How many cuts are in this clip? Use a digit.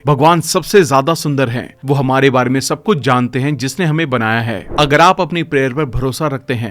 1